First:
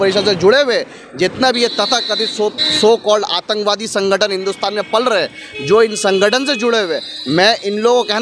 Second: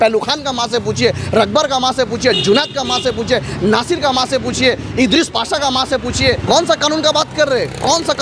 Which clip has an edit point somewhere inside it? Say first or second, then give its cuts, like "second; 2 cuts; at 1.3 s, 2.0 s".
second; 1 cut; at 6.4 s